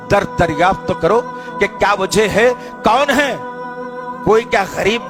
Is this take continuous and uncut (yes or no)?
yes